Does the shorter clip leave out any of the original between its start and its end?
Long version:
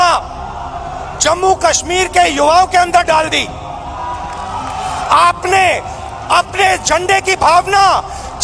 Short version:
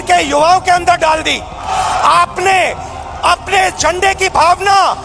yes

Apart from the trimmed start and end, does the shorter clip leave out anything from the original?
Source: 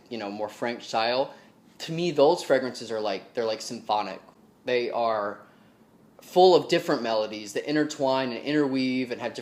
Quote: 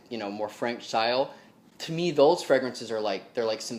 no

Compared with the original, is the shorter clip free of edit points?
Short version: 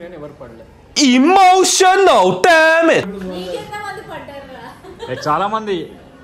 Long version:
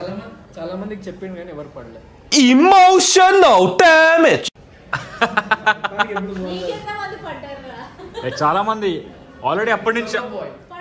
no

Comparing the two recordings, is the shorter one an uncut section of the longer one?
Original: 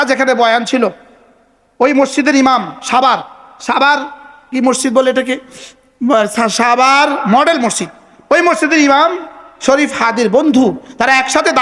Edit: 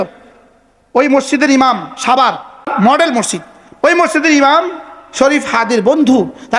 no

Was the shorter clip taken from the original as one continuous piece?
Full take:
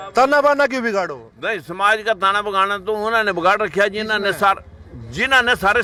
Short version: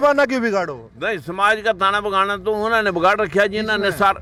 yes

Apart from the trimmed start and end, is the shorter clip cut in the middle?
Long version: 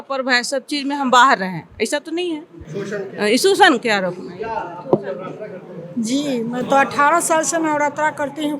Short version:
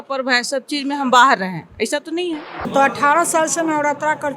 yes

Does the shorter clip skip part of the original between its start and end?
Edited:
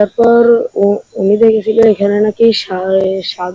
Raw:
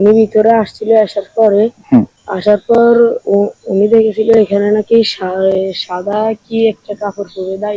no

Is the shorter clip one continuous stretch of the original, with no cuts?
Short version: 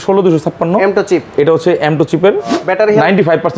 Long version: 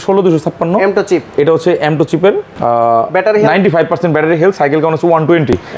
no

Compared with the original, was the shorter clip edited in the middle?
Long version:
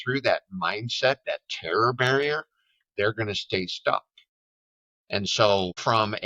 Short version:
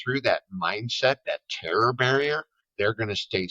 yes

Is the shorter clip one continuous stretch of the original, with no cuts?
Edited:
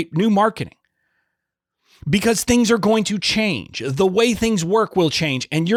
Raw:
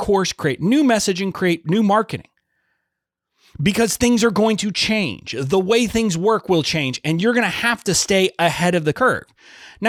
yes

